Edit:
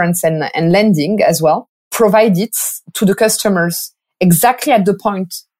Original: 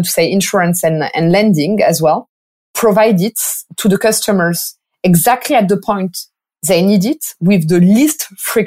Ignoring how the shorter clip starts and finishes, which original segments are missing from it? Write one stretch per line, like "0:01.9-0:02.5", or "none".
0:02.4-0:02.6